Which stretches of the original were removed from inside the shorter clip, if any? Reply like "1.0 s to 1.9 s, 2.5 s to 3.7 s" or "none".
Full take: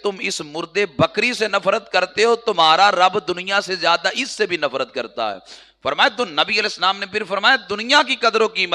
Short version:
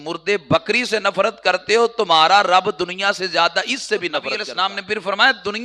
4.9 s to 6.6 s